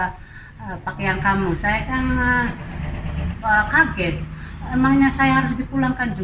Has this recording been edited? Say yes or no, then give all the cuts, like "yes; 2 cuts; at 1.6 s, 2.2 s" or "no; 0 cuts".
no; 0 cuts